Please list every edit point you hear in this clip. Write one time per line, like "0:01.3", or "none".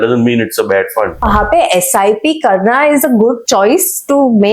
0:01.2
0:03.4